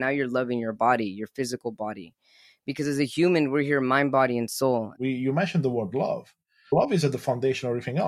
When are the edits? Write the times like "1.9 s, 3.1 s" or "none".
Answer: 4.9 s, 6.7 s